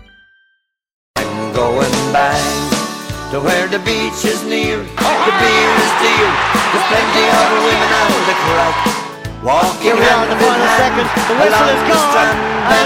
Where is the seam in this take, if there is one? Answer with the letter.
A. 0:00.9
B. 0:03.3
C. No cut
A